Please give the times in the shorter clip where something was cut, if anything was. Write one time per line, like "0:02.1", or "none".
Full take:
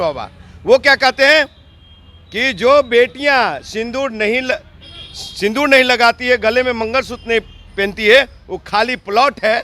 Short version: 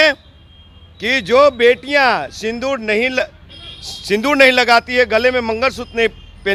none